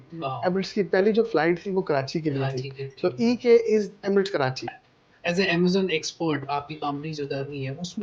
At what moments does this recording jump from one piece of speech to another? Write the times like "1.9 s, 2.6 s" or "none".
4.8 s

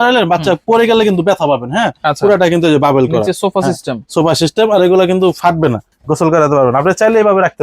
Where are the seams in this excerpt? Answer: 5.9 s

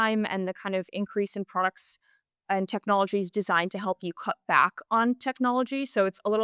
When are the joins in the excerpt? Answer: none

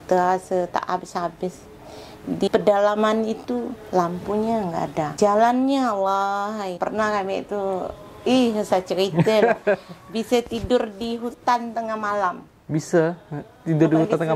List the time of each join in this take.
2.5 s, 5.1 s, 6.7 s

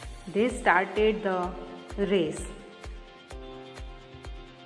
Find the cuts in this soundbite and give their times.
none

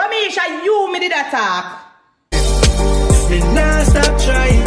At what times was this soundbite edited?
2.3 s

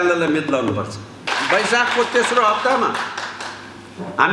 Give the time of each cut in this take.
1.2 s

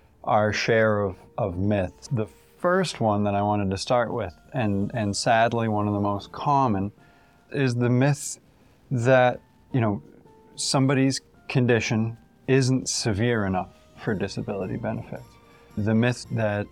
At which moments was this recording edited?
2.0 s

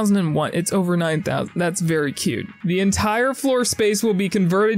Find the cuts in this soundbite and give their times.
2.5 s

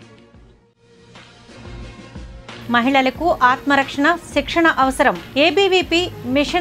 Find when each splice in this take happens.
2.6 s

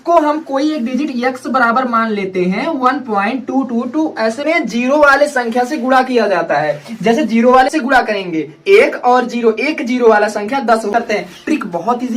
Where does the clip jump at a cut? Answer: 4.4 s, 7.7 s, 10.9 s

